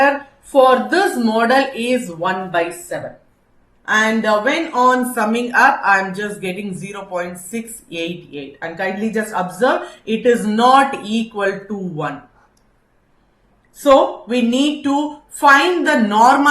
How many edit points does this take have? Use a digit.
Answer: 1